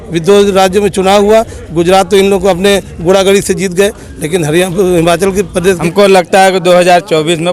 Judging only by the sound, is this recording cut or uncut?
cut